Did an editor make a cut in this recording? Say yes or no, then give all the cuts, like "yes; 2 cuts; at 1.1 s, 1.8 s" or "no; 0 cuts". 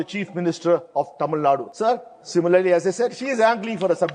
yes; 1 cut; at 1.7 s